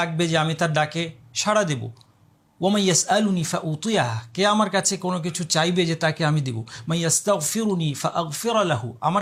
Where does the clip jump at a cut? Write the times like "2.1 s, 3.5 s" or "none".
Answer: none